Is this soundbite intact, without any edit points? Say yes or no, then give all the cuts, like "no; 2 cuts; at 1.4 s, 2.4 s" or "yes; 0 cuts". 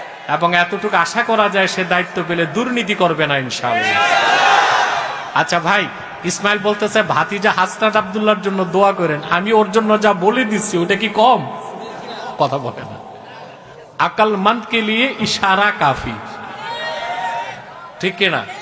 no; 1 cut; at 5.2 s